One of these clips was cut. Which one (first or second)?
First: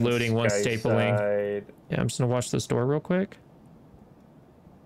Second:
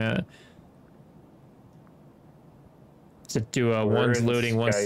first